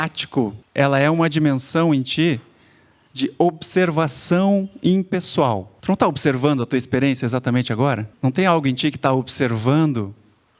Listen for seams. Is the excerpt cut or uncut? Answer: cut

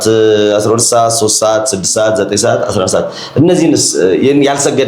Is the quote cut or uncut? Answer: uncut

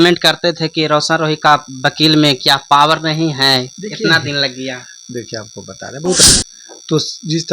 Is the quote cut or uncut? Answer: cut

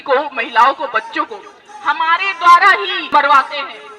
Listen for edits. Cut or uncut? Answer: cut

